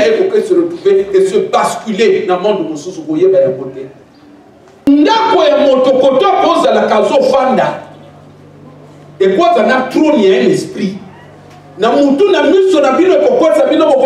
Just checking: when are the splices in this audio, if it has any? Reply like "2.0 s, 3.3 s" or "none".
4.9 s